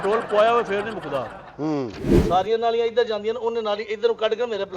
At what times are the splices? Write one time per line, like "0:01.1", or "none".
0:02.1